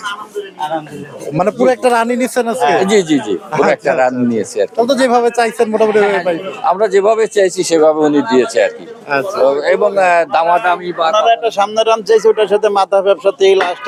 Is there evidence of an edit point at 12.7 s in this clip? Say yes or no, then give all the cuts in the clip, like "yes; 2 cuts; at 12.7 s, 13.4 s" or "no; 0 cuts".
no; 0 cuts